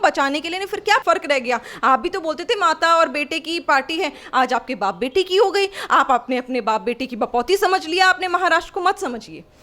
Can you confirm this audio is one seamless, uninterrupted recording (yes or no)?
no